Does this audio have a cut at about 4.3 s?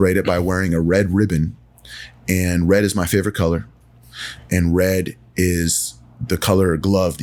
no; 0 cuts

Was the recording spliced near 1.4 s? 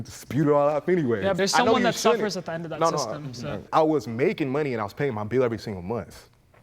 yes; 2 cuts; at 1.4 s, 3.6 s

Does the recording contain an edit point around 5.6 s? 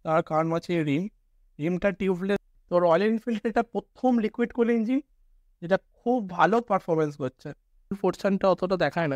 no; 2 cuts; at 2.5 s, 7.9 s

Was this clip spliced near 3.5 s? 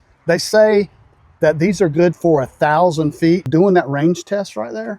yes; 1 cut; at 3.5 s

